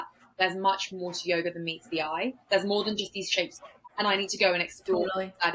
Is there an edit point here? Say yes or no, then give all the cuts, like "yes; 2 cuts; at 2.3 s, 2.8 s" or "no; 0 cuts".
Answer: no; 0 cuts